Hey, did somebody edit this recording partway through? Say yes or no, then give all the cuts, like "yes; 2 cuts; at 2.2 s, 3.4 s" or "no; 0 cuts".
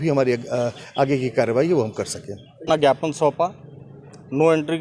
yes; 1 cut; at 2.8 s